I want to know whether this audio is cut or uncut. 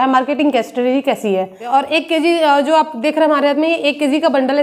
cut